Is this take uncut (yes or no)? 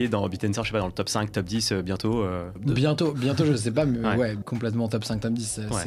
no